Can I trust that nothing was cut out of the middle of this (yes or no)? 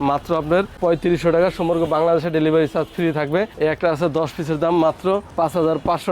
no